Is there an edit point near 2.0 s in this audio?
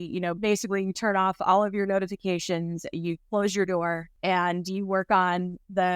no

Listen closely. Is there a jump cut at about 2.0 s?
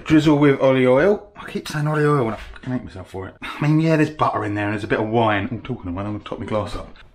no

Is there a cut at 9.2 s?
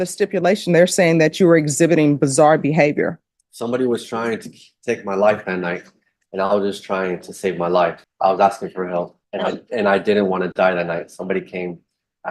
yes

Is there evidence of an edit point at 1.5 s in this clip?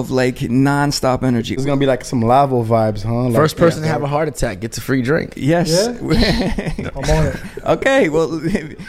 yes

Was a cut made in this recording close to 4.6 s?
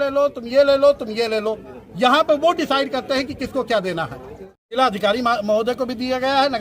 yes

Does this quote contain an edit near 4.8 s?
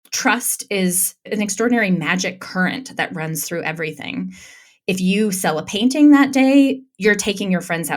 no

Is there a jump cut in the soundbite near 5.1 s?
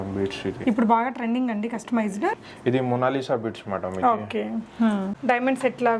yes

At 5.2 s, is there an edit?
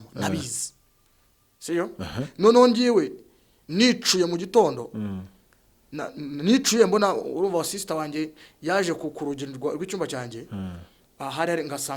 no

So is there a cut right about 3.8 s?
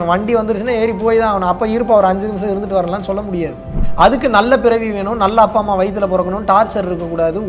yes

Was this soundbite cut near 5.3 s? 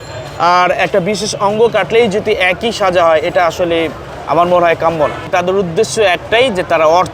yes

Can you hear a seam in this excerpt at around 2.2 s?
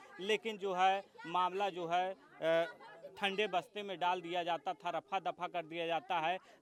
no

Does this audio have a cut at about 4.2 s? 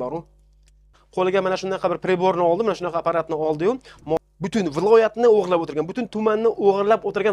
yes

